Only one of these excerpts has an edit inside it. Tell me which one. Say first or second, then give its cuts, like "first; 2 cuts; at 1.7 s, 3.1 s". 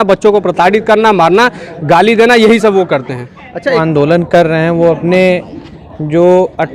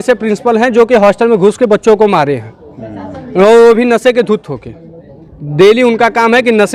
first; 1 cut; at 3.8 s